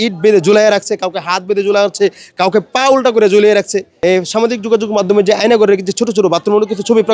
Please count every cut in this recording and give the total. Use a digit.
1